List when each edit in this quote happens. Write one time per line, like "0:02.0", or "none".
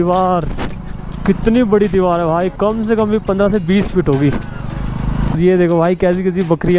0:05.4

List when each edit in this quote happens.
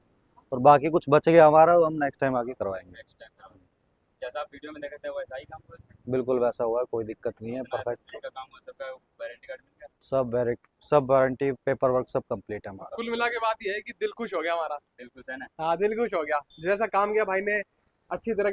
none

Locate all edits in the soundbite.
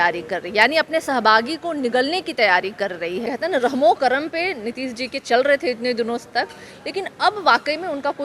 0:03.2

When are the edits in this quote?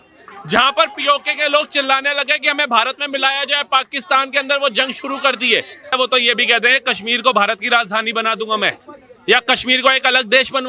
0:05.9

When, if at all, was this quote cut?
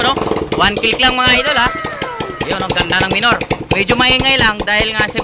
none

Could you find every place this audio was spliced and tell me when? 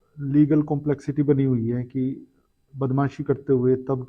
none

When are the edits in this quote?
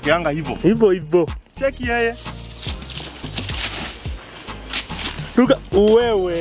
none

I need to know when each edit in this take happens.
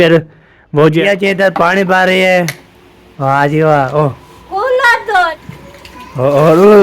0:01.0
0:05.4

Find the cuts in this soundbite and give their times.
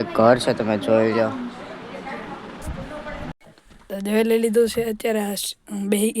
0:03.3

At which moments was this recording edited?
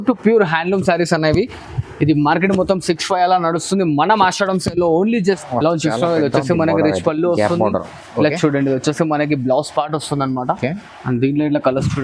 0:05.4

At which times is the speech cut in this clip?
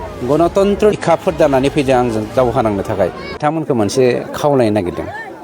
0:00.9
0:03.4

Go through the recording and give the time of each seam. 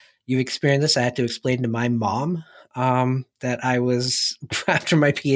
none

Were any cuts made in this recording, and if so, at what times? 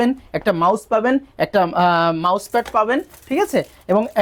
none

